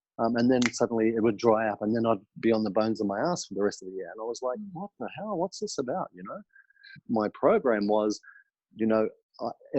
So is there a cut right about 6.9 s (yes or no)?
yes